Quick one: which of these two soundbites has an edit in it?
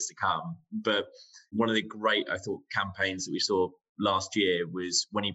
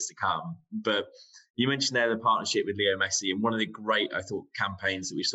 first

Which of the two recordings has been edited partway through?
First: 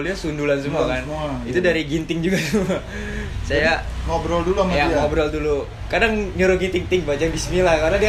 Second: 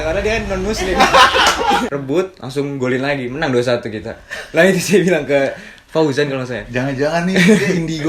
second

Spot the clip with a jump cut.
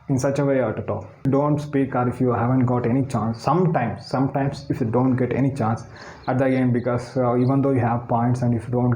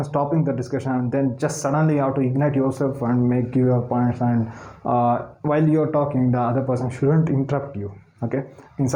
first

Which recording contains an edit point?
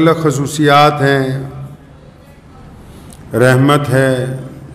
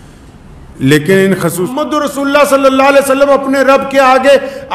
second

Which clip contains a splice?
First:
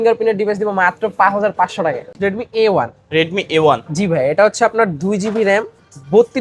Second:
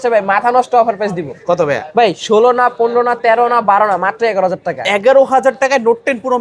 first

